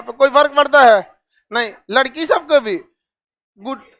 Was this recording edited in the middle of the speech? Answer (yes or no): no